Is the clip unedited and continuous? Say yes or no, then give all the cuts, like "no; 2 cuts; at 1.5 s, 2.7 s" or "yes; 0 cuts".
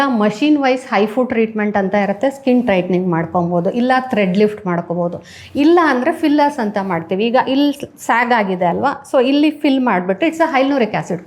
yes; 0 cuts